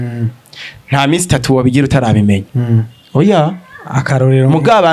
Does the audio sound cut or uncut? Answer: uncut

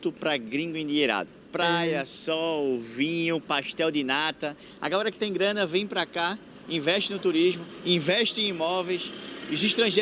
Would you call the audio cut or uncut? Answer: uncut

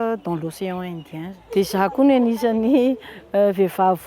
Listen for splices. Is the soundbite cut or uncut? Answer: cut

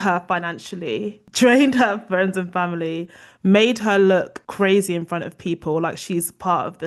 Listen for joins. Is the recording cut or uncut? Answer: uncut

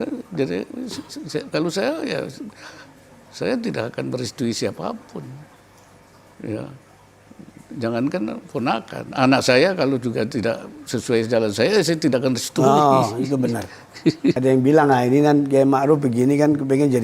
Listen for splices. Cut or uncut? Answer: cut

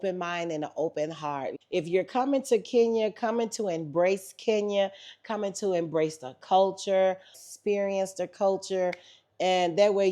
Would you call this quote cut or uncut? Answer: cut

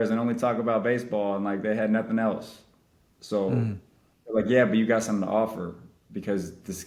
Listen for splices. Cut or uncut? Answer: uncut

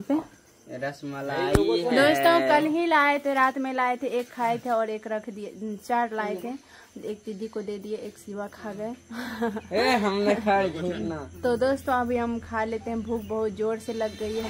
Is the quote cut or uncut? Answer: uncut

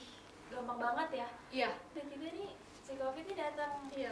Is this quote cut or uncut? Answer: cut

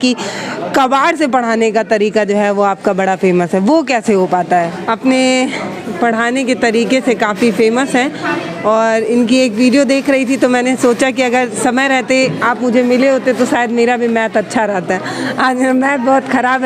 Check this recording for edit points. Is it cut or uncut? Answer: uncut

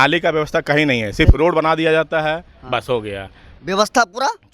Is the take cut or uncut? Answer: cut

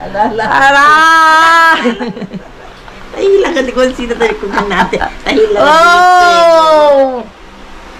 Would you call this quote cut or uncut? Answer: uncut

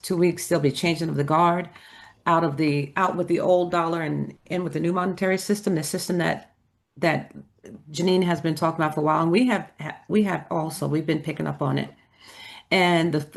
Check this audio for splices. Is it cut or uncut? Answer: uncut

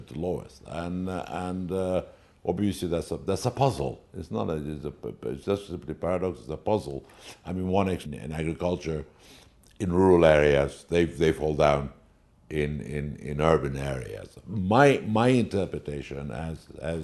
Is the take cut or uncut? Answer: uncut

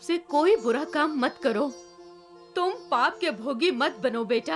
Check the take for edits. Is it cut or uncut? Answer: uncut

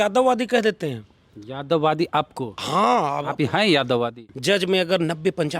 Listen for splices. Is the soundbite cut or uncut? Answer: cut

